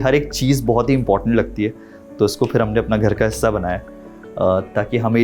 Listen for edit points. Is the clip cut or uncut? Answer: uncut